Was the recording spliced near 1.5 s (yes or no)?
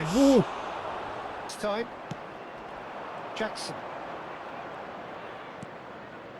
yes